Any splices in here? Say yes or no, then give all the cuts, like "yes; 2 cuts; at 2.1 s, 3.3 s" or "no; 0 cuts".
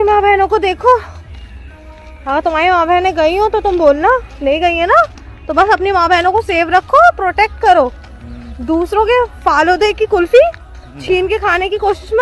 no; 0 cuts